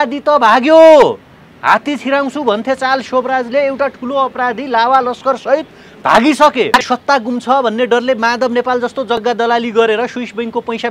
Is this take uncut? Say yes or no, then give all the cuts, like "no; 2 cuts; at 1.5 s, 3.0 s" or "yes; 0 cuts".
no; 2 cuts; at 6.9 s, 9.2 s